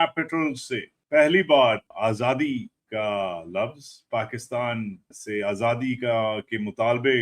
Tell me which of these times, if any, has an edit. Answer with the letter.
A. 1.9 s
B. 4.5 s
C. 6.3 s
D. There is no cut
A